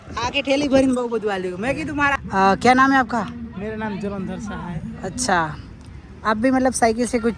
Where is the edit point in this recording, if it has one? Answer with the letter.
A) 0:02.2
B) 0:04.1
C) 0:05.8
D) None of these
A